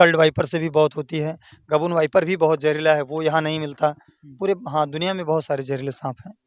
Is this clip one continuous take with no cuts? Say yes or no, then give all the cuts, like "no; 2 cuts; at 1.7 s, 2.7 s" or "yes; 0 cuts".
yes; 0 cuts